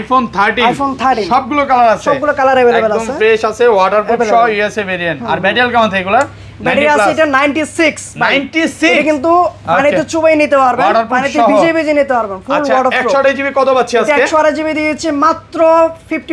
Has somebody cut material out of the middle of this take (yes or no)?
no